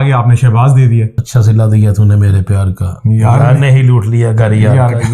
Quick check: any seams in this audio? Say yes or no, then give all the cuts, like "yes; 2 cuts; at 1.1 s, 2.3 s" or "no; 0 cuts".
yes; 1 cut; at 1.2 s